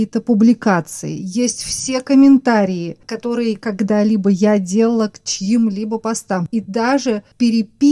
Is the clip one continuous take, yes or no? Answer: no